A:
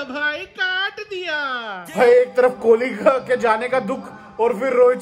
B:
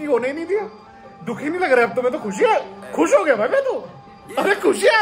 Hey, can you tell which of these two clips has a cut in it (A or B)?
A